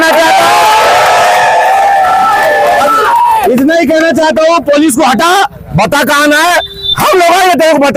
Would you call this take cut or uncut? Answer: uncut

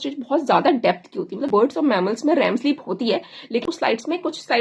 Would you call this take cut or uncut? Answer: cut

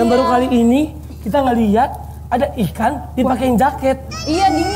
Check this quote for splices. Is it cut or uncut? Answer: uncut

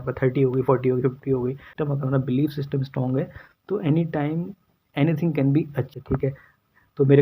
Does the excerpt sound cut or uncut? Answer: cut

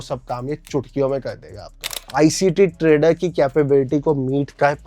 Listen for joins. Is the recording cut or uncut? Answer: cut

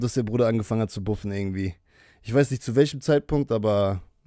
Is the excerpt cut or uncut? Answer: uncut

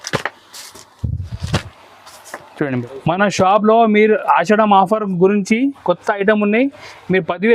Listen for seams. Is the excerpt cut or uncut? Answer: cut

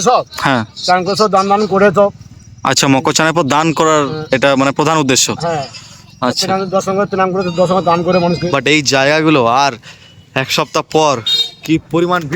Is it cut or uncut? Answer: cut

